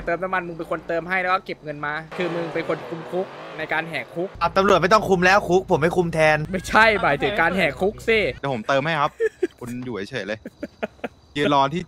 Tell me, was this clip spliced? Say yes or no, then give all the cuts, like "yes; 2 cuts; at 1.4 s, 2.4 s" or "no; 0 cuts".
yes; 4 cuts; at 2.1 s, 4.3 s, 6.5 s, 8.4 s